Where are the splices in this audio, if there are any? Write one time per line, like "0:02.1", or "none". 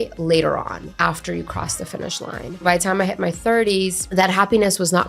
0:01.0
0:02.6
0:04.0